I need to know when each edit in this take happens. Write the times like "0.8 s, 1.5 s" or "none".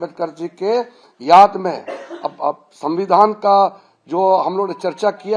none